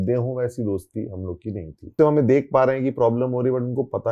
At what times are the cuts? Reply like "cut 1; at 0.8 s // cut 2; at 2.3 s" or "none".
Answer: cut 1; at 2.0 s